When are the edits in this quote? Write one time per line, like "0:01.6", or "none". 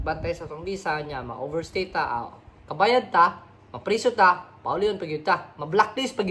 none